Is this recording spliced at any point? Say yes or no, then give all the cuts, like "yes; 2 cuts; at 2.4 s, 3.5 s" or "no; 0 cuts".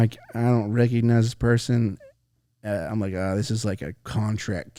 no; 0 cuts